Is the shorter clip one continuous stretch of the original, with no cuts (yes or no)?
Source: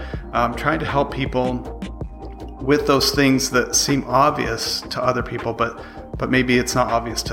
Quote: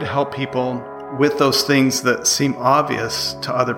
no